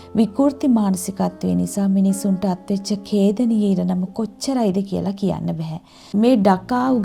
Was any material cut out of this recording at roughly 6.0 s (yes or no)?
yes